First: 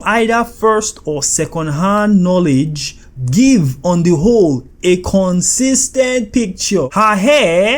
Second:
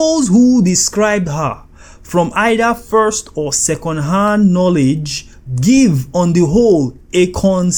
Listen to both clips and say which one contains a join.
first; 1 cut; at 6.9 s

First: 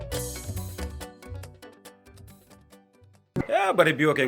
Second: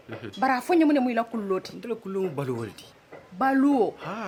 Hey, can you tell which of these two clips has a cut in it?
first; 1 cut; at 3.2 s

